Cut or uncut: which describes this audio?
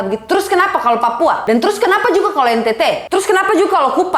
cut